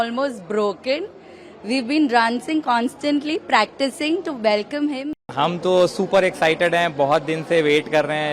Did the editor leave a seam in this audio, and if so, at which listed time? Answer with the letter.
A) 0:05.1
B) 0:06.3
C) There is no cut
A